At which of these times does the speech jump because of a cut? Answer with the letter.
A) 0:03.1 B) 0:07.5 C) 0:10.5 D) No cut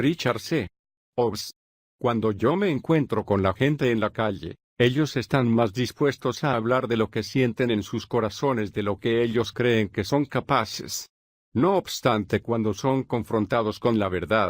A